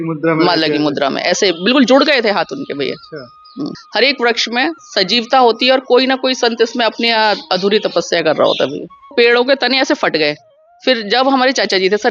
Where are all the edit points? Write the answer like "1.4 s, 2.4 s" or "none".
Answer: 3.8 s, 9.1 s